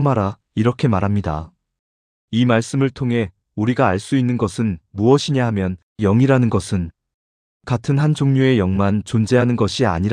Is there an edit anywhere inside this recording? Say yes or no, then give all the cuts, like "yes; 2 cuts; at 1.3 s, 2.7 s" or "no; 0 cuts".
no; 0 cuts